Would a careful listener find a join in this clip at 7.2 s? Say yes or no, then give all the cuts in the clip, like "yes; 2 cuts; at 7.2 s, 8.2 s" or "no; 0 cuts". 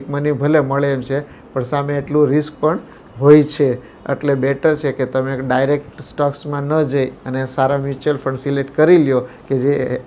no; 0 cuts